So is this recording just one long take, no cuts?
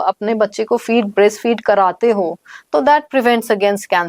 yes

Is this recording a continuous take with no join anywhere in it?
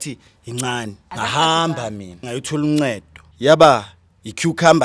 no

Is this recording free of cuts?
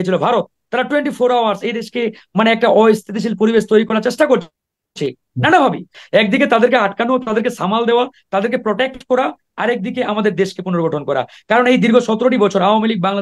no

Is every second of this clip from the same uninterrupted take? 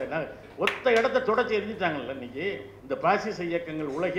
no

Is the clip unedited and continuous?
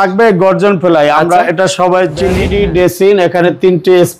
no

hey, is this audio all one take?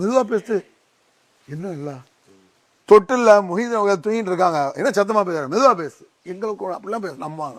yes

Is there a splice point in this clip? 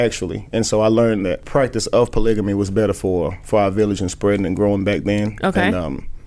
yes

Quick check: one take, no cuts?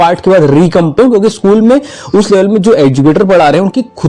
no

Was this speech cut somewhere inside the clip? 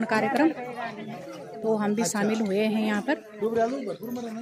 no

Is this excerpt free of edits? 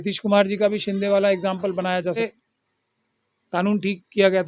no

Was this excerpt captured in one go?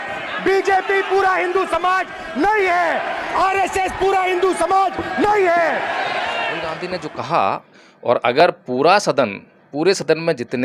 no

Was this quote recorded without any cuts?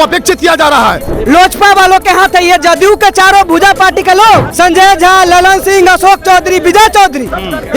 no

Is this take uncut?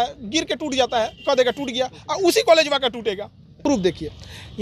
no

